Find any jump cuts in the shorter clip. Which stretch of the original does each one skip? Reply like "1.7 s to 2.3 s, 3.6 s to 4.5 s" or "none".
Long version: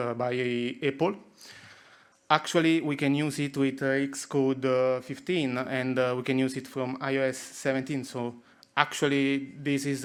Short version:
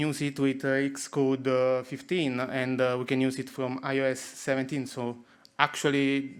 none